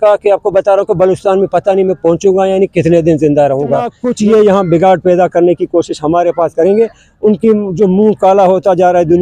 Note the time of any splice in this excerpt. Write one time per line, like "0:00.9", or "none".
0:04.0